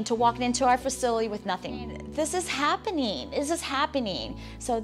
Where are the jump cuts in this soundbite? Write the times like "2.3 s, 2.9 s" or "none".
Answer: 1.8 s